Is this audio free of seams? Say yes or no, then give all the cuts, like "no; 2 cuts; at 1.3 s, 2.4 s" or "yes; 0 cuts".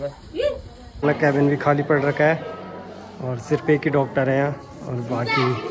no; 1 cut; at 1.0 s